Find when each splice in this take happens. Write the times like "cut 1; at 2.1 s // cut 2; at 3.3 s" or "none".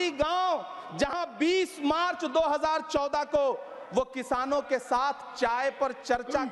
none